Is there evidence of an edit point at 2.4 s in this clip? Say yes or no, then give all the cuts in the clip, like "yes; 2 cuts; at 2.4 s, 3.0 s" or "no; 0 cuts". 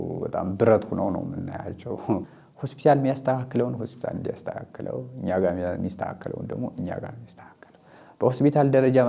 yes; 1 cut; at 2.4 s